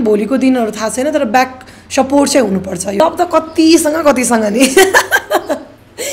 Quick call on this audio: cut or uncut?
cut